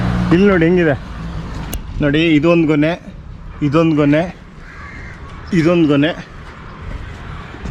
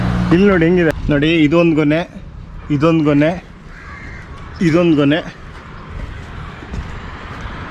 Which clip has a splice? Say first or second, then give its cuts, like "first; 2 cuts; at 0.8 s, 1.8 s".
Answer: second; 1 cut; at 1.0 s